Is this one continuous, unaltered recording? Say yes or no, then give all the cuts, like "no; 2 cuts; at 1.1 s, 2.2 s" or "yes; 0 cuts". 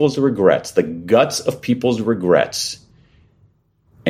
yes; 0 cuts